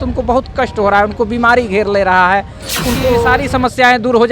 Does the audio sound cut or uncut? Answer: cut